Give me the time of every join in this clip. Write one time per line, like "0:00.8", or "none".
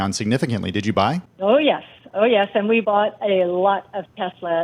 0:01.3
0:02.8